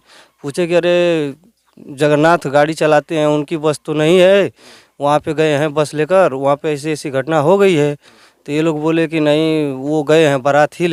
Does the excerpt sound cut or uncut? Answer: uncut